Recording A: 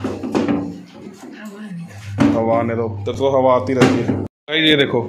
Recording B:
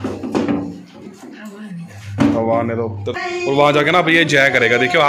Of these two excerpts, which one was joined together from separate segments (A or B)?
B